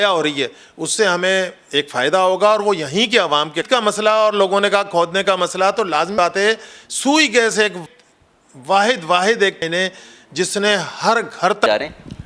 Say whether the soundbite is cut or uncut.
cut